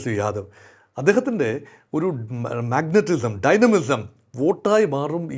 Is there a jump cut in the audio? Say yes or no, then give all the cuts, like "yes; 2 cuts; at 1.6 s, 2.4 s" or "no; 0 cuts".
no; 0 cuts